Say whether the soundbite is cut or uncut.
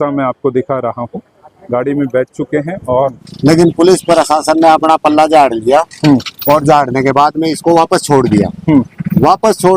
cut